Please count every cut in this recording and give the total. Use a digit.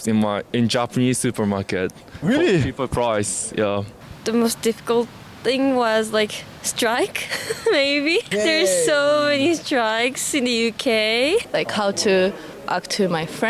3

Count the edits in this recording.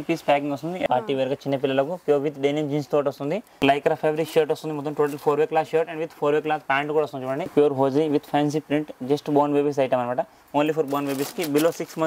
3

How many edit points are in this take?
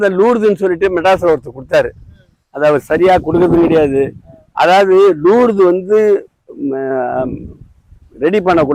0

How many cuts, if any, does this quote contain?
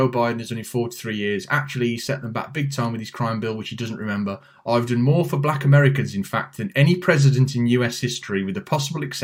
0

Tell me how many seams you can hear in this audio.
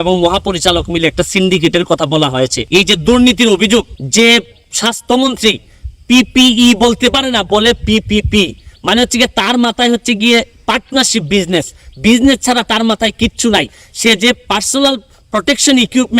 2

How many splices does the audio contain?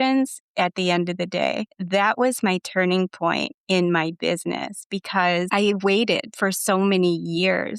2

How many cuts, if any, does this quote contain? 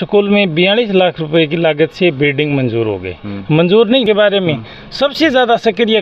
1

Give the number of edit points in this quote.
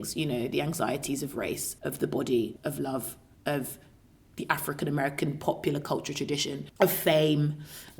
2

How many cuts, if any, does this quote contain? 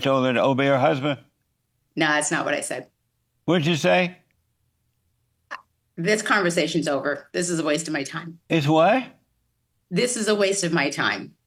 0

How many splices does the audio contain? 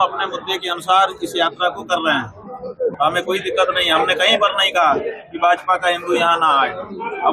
1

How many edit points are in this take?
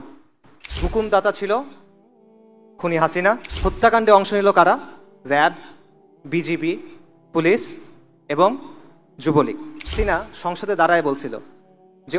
3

